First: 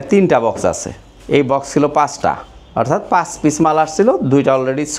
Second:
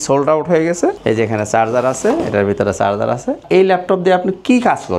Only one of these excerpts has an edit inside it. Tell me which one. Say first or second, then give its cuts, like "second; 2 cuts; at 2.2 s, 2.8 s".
second; 2 cuts; at 1.0 s, 3.4 s